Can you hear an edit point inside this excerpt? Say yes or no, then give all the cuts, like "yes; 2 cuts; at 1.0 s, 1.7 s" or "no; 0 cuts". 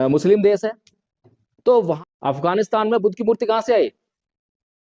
yes; 1 cut; at 2.0 s